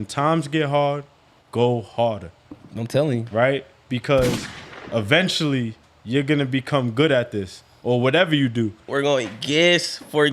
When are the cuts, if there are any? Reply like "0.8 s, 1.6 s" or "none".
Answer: 8.9 s